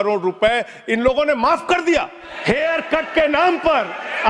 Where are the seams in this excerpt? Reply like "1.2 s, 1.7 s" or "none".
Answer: 2.3 s